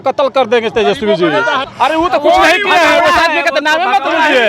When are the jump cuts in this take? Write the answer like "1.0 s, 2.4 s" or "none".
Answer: 1.6 s